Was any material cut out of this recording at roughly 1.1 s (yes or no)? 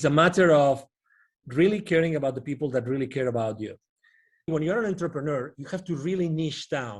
no